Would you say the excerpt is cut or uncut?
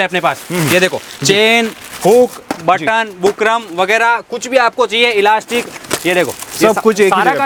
uncut